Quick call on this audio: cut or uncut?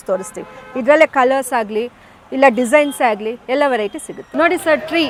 uncut